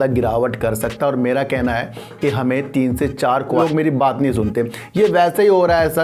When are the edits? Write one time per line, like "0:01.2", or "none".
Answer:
0:03.6